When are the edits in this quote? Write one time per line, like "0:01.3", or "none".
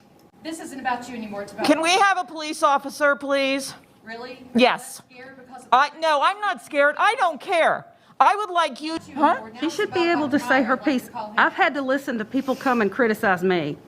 0:09.0